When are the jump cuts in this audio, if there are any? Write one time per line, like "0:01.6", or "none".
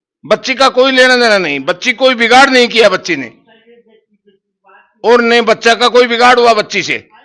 none